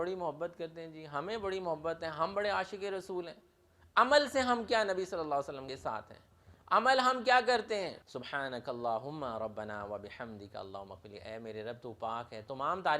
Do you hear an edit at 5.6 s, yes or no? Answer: yes